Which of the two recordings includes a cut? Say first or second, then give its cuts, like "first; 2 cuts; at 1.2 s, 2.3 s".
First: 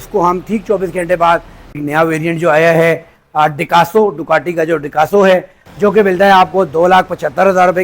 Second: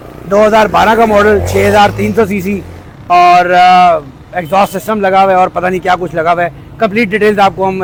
first; 2 cuts; at 1.8 s, 5.6 s